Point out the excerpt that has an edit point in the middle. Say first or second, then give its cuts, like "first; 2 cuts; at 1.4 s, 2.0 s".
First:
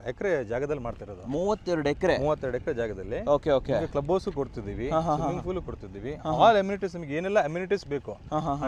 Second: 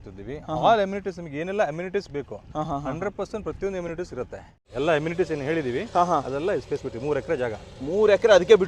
second; 1 cut; at 4.6 s